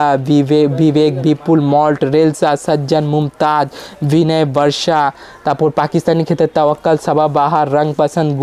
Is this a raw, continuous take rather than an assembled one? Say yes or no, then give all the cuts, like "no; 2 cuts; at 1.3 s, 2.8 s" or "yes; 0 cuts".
yes; 0 cuts